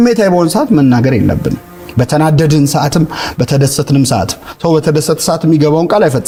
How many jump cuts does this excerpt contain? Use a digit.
0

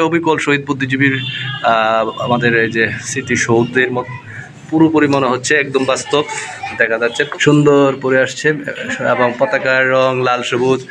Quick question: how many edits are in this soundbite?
1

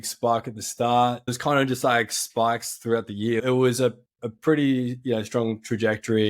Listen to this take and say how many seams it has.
2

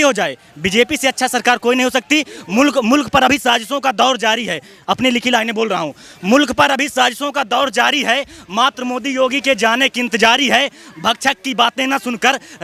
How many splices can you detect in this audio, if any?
0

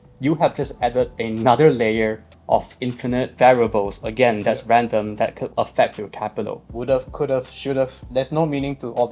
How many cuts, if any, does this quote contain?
4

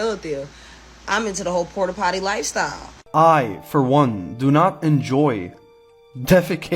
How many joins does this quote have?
1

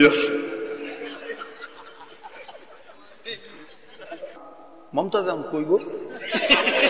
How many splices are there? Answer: 1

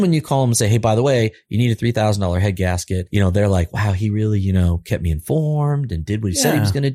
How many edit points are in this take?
1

